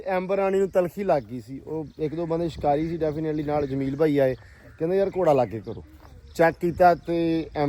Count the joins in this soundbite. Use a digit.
0